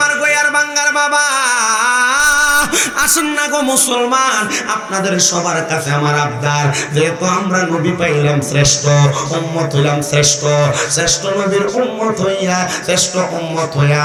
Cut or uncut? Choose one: uncut